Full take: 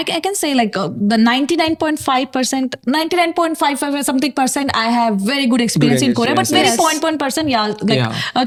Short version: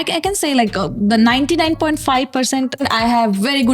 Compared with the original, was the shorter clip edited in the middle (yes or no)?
yes